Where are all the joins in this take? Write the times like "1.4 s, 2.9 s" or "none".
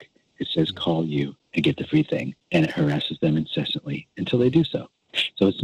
1.4 s, 2.3 s